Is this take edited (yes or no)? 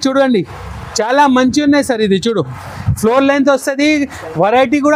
no